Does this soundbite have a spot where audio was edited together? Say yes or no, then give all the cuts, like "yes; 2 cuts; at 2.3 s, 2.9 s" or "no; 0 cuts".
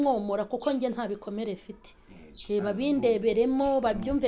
no; 0 cuts